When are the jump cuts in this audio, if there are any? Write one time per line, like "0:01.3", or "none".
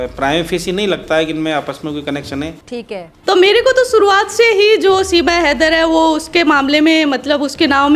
0:02.7